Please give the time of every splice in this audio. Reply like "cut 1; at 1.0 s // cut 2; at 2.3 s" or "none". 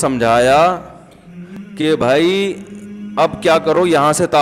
none